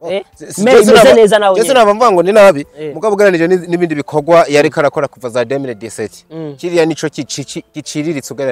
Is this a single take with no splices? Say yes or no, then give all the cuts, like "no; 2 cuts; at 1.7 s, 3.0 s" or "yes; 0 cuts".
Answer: yes; 0 cuts